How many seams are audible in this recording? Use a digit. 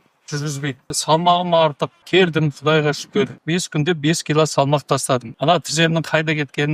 4